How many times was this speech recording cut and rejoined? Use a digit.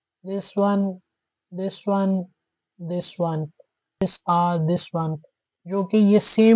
1